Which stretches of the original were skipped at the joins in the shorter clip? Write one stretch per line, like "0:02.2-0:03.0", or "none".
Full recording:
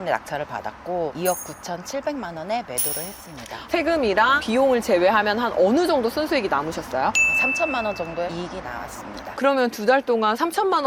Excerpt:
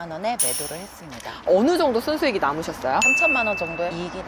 0:03.7-0:05.5
0:07.2-0:07.5

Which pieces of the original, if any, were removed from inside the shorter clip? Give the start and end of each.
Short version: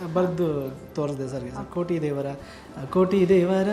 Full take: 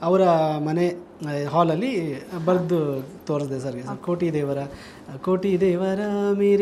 none

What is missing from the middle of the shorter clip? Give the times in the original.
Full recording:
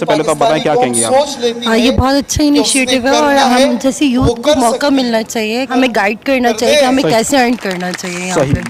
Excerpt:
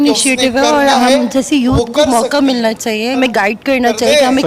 0:05.6-0:05.8

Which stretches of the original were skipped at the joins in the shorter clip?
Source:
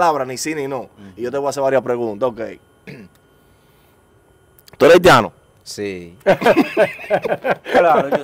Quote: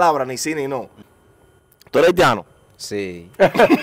0:01.0-0:03.9

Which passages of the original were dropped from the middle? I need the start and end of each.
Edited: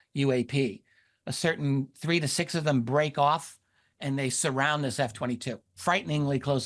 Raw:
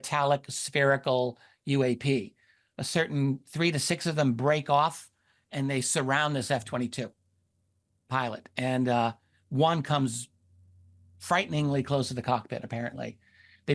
0:07.1-0:11.1

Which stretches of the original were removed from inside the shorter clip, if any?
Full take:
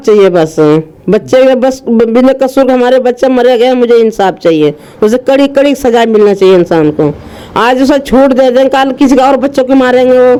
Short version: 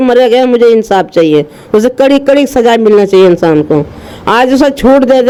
none

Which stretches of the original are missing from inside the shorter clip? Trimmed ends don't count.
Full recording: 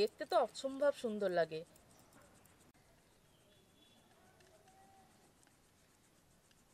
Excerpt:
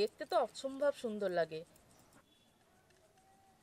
0:02.2-0:03.7

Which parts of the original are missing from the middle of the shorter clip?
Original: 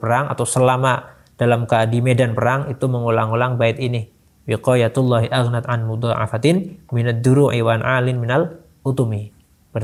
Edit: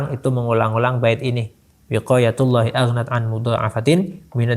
none

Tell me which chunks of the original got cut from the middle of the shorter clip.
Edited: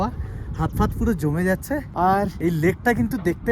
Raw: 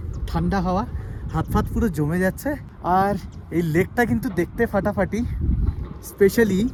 0:02.8-0:03.2

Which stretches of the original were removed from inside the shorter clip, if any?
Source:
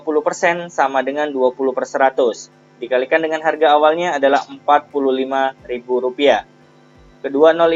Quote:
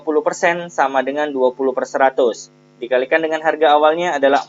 none

